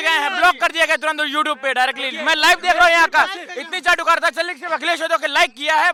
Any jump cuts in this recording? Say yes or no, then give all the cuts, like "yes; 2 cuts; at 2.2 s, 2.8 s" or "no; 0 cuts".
no; 0 cuts